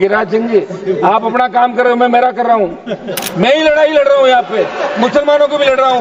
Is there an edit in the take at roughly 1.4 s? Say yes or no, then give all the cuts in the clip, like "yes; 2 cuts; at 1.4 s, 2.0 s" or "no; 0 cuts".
no; 1 cut; at 3.2 s